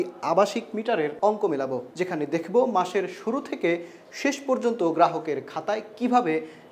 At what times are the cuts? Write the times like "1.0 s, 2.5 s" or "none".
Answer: 1.1 s, 1.9 s